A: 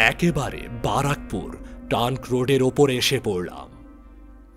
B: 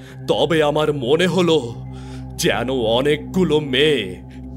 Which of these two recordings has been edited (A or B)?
A